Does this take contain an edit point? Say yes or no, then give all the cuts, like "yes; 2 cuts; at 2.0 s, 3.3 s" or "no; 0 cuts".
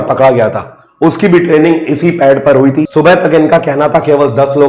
yes; 1 cut; at 2.9 s